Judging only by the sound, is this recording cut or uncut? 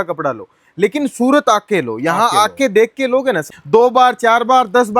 cut